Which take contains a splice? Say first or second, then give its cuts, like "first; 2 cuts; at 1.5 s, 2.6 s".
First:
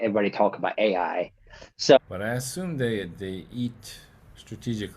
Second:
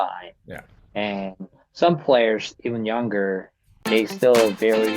first; 1 cut; at 2.0 s